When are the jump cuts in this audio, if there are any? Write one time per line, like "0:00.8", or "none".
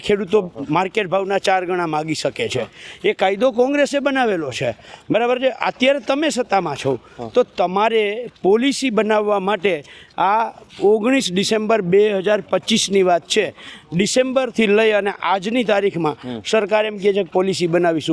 none